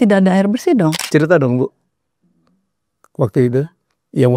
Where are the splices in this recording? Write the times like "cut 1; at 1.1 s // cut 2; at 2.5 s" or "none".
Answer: cut 1; at 1.0 s